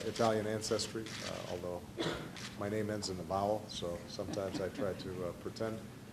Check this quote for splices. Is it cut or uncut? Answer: cut